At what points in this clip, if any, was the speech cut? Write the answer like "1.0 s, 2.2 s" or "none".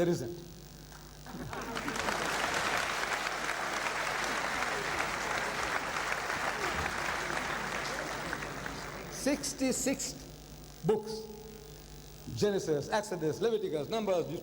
13.0 s